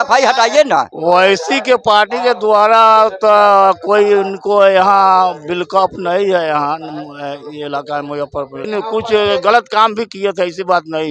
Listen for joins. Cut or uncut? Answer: cut